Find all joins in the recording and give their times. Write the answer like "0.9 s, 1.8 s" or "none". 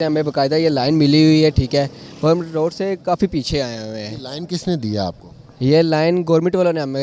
none